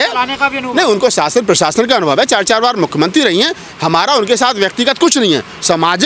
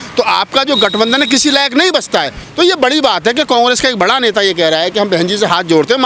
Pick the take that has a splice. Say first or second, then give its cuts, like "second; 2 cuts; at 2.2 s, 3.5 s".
second; 1 cut; at 2.4 s